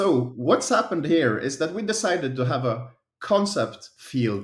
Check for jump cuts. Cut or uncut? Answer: uncut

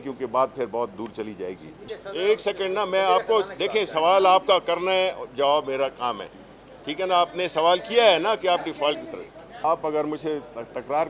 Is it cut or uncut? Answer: cut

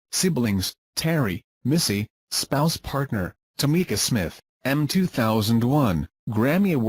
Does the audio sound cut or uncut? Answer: uncut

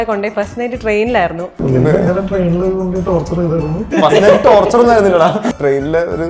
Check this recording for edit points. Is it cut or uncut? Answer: cut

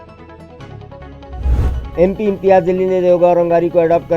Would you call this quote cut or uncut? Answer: cut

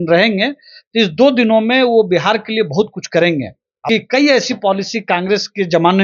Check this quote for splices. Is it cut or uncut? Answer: cut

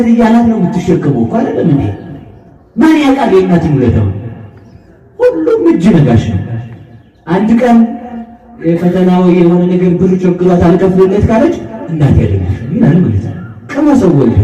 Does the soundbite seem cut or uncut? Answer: uncut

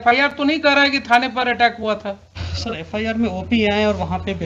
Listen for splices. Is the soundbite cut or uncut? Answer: uncut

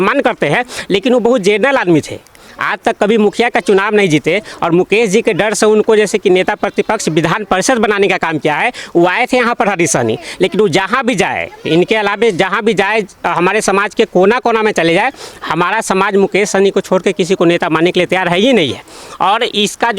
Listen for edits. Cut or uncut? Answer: uncut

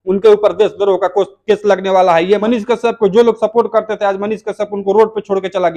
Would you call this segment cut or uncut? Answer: cut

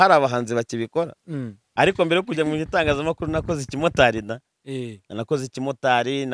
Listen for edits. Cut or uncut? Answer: cut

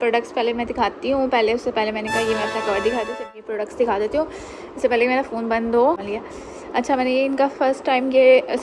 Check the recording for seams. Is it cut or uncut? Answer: cut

